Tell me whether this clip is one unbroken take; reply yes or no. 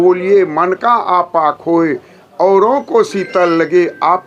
yes